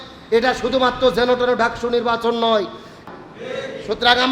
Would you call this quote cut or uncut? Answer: cut